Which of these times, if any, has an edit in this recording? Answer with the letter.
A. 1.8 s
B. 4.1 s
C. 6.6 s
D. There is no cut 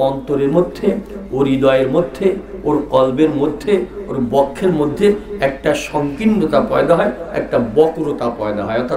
D